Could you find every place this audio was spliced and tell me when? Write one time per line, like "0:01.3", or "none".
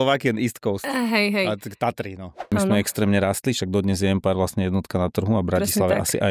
0:02.5